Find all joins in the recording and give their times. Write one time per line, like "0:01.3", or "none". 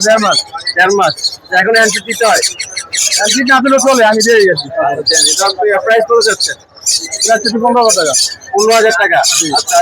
none